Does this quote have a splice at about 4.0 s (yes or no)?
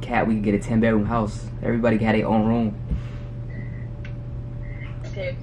no